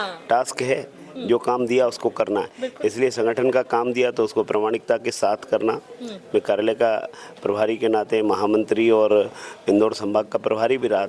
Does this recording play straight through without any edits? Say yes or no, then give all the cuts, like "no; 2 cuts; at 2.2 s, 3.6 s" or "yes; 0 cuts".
yes; 0 cuts